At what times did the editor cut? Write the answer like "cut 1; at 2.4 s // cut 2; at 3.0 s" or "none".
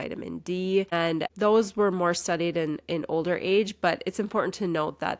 cut 1; at 0.9 s